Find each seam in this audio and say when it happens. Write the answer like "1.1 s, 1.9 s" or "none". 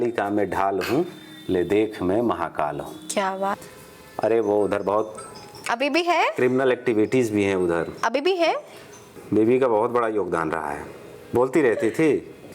3.6 s, 9.2 s, 11.1 s